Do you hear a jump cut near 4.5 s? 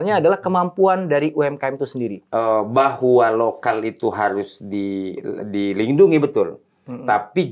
no; 1 cut; at 2.2 s

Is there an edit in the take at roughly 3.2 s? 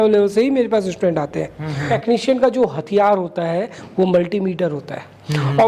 no; 1 cut; at 1.8 s

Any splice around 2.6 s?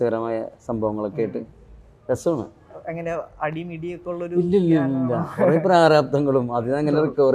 no; 0 cuts

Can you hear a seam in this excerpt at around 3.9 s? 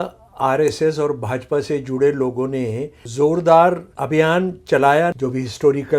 yes; 3 cuts; at 3.0 s, 3.9 s, 5.1 s

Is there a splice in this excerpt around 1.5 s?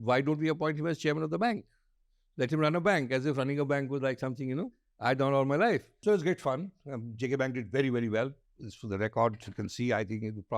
no; 1 cut; at 5.9 s

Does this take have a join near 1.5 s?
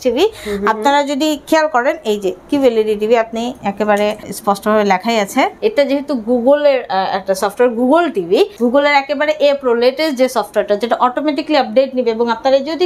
no; 3 cuts; at 4.3 s, 5.5 s, 8.5 s

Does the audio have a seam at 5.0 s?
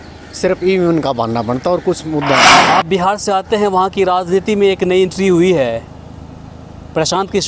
no; 1 cut; at 2.4 s

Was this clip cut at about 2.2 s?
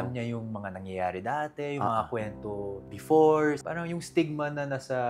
no; 1 cut; at 3.6 s

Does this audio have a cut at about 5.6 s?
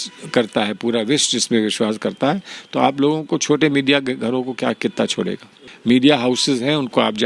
yes; 1 cut; at 5.6 s

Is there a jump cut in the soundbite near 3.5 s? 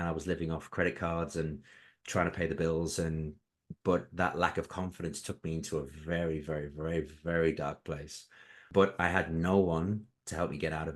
no; 1 cut; at 8.6 s

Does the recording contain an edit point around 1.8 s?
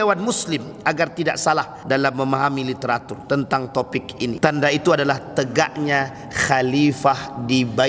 yes; 2 cuts; at 1.8 s, 4.4 s

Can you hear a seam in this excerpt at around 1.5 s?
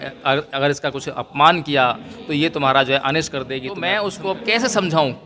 no; 1 cut; at 3.7 s

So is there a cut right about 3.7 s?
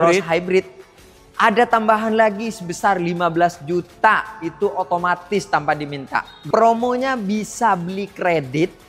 no; 1 cut; at 6.4 s

